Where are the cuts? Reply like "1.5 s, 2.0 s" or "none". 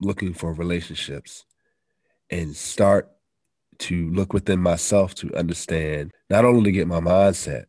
6.1 s